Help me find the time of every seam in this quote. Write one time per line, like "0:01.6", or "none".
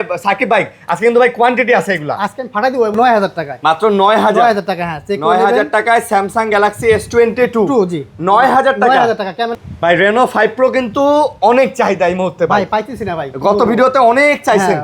0:02.9
0:09.6

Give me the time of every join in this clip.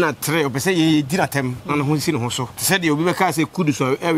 0:02.5

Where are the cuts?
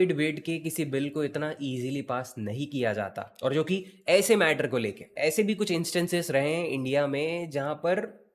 none

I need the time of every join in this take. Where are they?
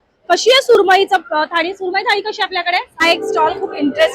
0:02.9

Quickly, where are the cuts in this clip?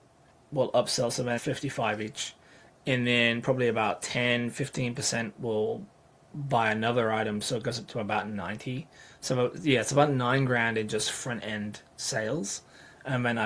none

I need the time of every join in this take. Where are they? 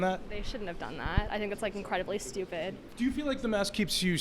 0:02.8

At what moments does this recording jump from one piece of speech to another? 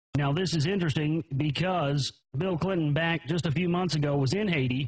0:01.7

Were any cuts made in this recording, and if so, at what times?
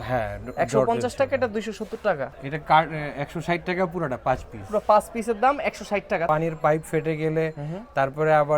0:02.4
0:06.3

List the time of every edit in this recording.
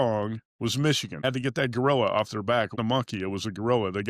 0:01.2
0:02.8

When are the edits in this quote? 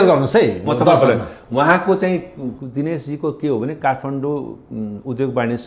none

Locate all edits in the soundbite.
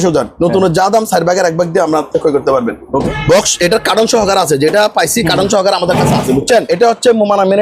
0:03.1
0:06.7

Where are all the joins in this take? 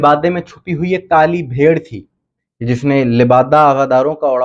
none

